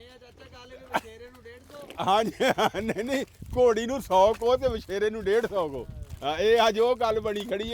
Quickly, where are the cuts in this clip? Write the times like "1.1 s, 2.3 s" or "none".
none